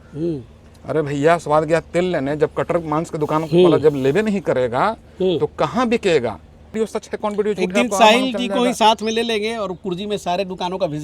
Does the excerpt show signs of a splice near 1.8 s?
no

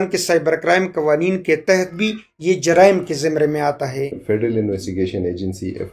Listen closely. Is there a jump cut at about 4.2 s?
yes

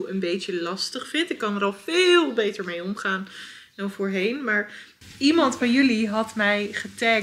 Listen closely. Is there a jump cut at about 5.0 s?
yes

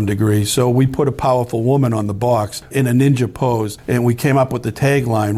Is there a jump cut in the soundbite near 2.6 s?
yes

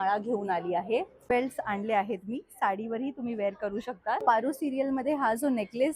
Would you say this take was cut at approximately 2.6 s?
no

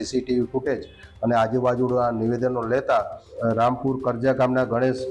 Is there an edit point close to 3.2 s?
yes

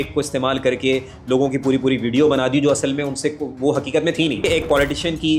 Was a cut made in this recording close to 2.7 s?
no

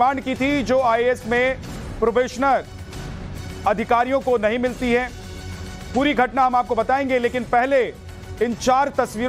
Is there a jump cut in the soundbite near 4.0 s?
yes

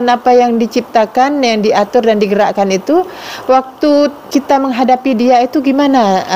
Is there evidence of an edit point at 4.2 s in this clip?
yes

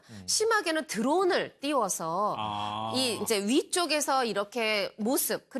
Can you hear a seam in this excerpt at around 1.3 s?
no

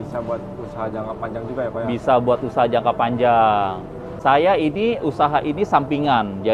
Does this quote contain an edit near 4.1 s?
yes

